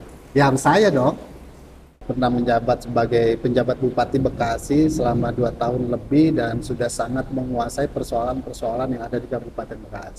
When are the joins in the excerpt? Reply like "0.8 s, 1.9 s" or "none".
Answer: 2.0 s